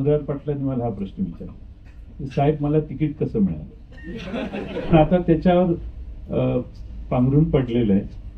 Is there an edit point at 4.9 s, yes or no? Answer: yes